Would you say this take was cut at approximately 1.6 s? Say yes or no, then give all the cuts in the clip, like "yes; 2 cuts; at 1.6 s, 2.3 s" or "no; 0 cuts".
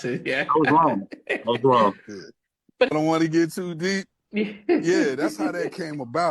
no; 1 cut; at 2.9 s